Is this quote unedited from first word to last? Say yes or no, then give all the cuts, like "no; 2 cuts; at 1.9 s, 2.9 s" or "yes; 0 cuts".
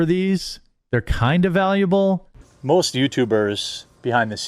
no; 1 cut; at 2.4 s